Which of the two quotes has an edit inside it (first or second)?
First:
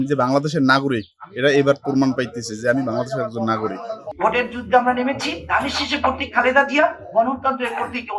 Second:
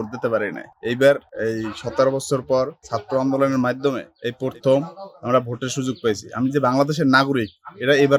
first